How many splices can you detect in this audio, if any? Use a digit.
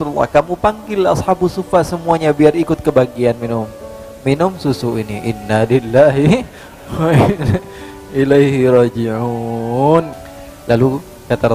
1